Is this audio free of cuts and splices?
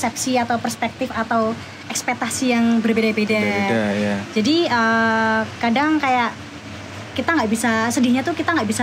yes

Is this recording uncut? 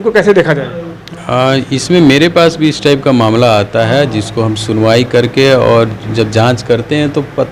yes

